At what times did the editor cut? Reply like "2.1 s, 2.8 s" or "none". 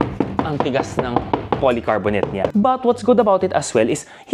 2.5 s